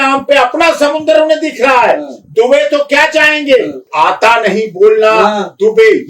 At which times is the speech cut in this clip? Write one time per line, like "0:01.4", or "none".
0:03.9